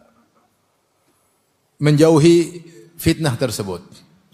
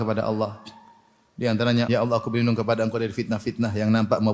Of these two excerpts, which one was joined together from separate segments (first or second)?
second